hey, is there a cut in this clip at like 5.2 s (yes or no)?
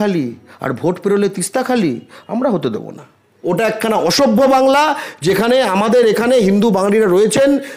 no